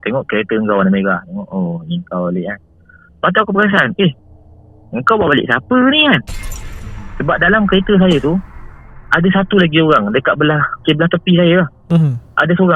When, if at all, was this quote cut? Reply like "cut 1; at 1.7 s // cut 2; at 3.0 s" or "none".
cut 1; at 10.7 s